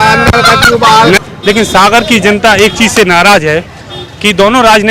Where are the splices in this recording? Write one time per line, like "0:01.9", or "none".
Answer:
0:01.2